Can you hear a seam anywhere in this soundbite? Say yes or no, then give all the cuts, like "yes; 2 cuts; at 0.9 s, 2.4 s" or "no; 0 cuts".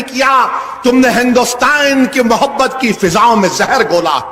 yes; 1 cut; at 2.1 s